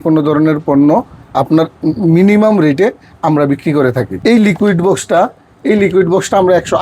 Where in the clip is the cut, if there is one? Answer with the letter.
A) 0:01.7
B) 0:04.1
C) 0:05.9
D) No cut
B